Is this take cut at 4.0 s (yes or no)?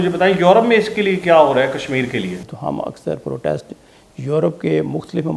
no